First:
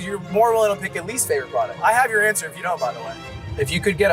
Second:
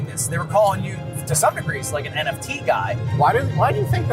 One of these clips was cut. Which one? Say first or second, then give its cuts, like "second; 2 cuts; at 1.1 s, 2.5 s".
first; 2 cuts; at 1.7 s, 3.1 s